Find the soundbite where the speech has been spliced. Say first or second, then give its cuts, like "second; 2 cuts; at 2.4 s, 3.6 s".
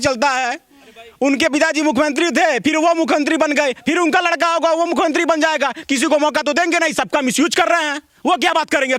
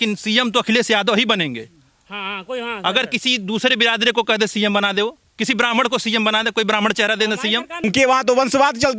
second; 1 cut; at 7.8 s